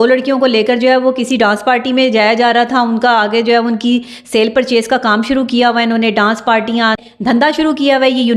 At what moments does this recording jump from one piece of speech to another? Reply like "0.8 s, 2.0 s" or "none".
7.0 s